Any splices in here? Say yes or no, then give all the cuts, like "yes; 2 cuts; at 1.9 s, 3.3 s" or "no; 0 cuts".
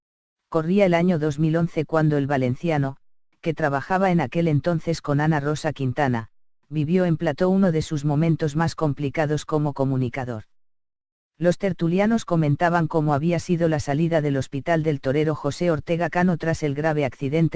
yes; 1 cut; at 1.3 s